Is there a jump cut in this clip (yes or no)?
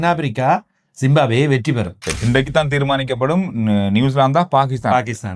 yes